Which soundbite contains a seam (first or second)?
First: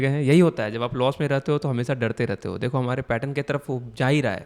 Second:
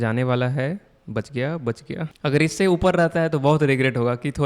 second